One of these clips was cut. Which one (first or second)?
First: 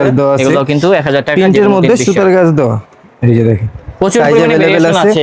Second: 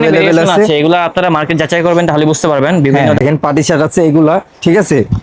second